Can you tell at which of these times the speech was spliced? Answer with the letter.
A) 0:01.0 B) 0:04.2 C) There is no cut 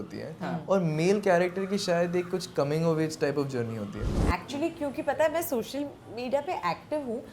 B